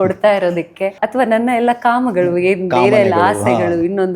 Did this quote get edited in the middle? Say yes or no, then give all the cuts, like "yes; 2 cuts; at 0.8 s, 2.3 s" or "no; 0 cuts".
yes; 1 cut; at 1.0 s